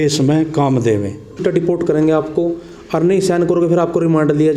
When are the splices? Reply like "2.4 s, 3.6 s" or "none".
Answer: 1.4 s